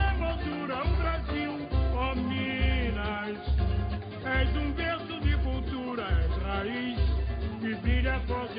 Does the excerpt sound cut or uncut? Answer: uncut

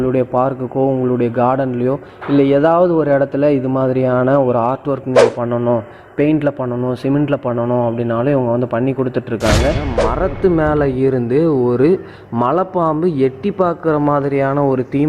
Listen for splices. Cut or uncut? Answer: cut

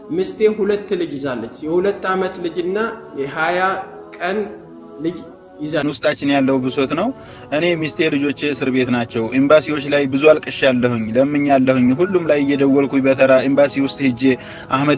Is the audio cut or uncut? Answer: cut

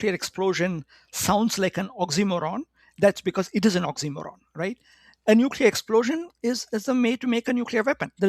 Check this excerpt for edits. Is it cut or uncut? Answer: uncut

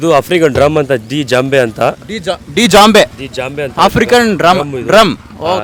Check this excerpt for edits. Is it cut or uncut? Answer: uncut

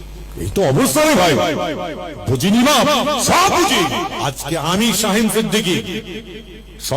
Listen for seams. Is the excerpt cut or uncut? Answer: cut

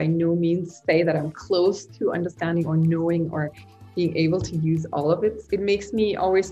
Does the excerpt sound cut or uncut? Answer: cut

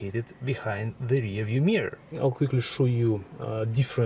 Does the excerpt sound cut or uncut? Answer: cut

